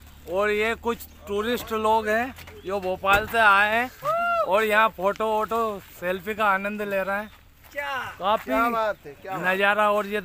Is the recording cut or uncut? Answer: uncut